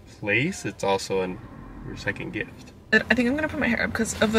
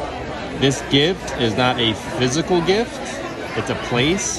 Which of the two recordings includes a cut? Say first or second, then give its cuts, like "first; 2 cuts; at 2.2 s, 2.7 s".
first; 1 cut; at 2.8 s